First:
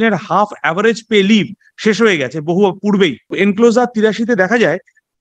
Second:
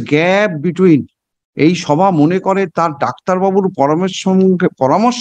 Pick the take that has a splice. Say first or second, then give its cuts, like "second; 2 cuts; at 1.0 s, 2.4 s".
first; 1 cut; at 3.3 s